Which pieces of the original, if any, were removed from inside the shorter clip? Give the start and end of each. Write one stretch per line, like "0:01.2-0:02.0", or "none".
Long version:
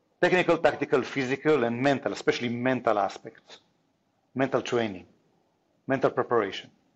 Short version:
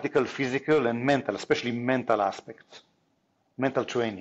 none